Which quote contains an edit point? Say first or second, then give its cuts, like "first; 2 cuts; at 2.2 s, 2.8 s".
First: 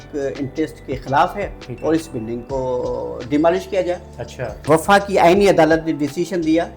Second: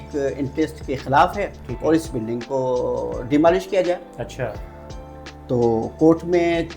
first; 1 cut; at 4.6 s